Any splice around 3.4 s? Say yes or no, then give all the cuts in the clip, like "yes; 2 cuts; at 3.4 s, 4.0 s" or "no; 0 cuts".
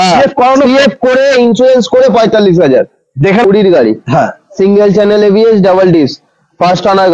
yes; 1 cut; at 3.4 s